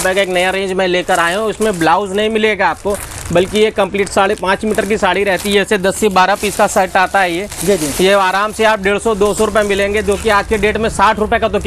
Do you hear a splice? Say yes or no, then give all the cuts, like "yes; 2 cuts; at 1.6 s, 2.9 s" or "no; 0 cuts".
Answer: no; 0 cuts